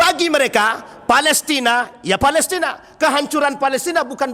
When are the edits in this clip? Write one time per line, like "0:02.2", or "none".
none